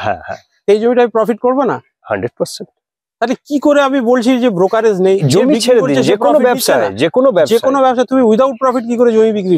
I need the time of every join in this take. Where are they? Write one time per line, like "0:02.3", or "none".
none